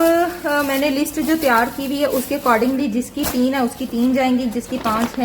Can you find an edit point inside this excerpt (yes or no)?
no